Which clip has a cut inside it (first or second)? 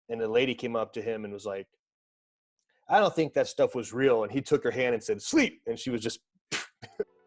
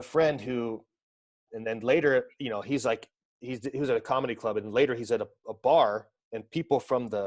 second